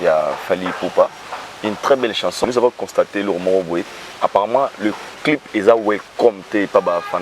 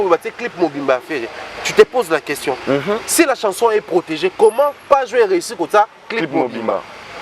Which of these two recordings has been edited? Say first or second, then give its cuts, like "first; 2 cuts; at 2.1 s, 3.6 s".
first; 1 cut; at 2.4 s